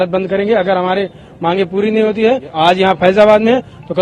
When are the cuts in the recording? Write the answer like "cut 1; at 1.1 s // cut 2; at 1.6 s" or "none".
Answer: cut 1; at 2.5 s